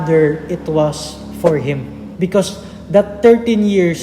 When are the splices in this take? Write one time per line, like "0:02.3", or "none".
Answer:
0:02.0